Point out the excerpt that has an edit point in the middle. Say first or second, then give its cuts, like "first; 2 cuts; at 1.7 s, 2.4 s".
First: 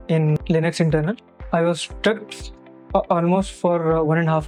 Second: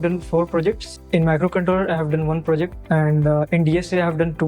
second; 2 cuts; at 0.9 s, 2.8 s